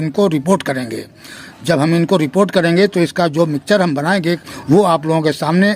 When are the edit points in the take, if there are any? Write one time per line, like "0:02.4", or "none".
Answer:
0:04.4